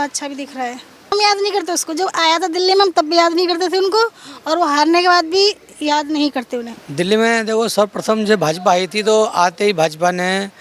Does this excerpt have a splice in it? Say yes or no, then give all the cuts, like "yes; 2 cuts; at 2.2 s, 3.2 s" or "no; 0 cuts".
yes; 2 cuts; at 1.1 s, 6.7 s